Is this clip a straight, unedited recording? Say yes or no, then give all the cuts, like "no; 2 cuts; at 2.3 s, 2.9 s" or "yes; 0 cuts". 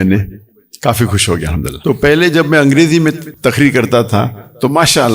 no; 2 cuts; at 1.7 s, 3.3 s